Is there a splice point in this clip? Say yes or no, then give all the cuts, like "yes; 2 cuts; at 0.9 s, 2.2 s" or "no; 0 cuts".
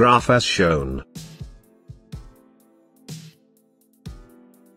yes; 1 cut; at 1.1 s